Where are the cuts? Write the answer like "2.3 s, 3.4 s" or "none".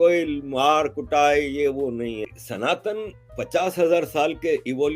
2.3 s